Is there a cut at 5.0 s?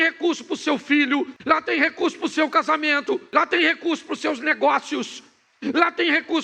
no; 2 cuts; at 1.4 s, 3.2 s

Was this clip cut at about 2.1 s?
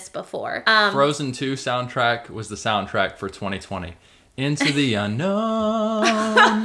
no; 0 cuts

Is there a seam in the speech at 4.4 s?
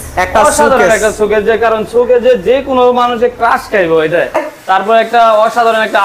yes; 1 cut; at 4.4 s

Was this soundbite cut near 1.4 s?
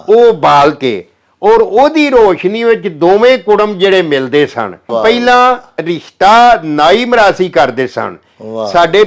no; 1 cut; at 4.9 s

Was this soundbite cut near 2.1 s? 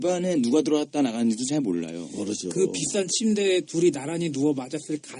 yes; 1 cut; at 2.1 s

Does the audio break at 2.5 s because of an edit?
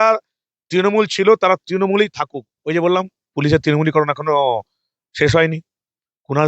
yes; 1 cut; at 2.5 s

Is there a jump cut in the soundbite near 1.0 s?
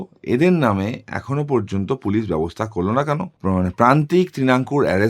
no; 1 cut; at 3.3 s

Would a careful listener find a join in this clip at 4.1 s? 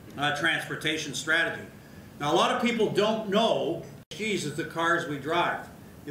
yes; 1 cut; at 4.1 s

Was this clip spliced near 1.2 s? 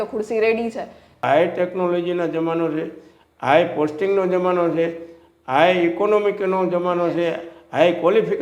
yes; 1 cut; at 1.2 s

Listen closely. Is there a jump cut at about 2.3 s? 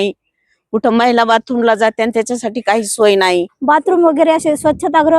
no; 1 cut; at 3.5 s

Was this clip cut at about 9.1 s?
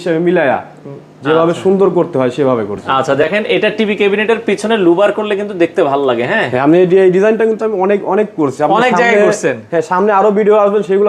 no; 1 cut; at 2.9 s

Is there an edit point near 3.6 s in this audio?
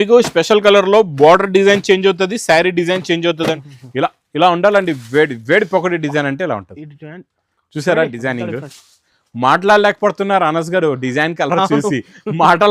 yes; 1 cut; at 3.6 s

